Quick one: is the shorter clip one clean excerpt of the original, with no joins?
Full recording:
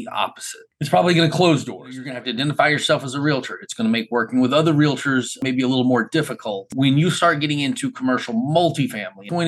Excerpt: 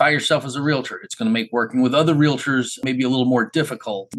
yes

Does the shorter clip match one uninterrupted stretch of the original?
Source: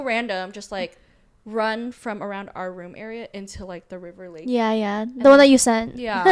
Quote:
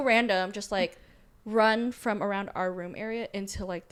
yes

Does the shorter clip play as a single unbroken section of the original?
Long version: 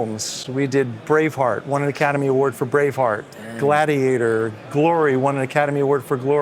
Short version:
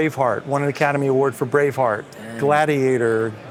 yes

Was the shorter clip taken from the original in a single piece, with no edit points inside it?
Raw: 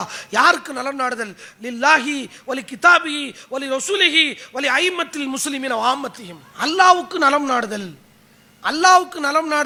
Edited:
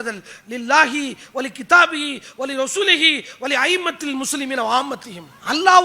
yes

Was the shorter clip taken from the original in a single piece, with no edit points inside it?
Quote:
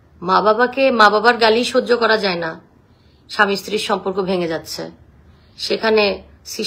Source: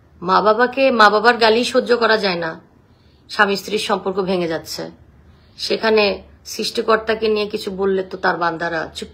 yes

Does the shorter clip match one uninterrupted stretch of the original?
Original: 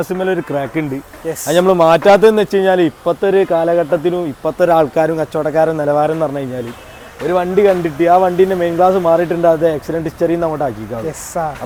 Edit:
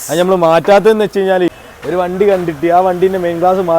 no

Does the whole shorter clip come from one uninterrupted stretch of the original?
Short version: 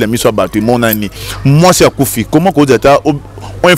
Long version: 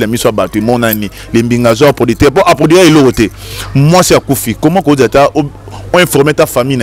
no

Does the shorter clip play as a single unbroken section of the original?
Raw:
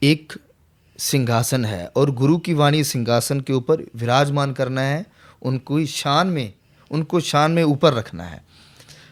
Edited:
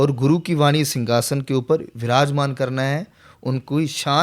yes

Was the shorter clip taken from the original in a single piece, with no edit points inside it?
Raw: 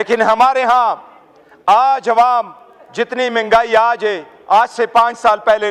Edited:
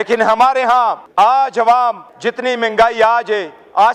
no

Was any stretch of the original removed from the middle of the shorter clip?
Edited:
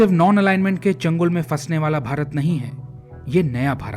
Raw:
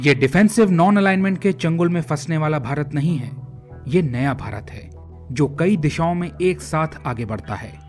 no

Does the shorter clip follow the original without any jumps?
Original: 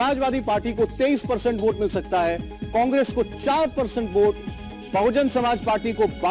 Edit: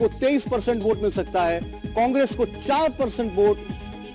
yes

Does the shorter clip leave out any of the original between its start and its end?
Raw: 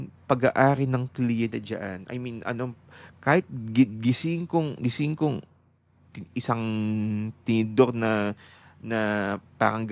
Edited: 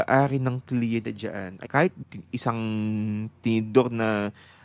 yes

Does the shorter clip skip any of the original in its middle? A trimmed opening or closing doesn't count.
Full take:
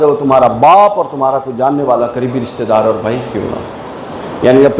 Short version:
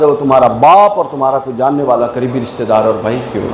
no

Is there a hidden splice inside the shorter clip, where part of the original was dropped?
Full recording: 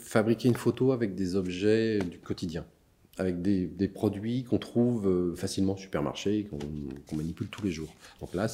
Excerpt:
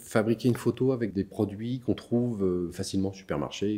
yes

